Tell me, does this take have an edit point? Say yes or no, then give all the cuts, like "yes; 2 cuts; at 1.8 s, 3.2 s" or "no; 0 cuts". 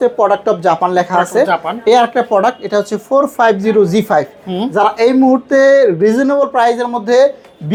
no; 0 cuts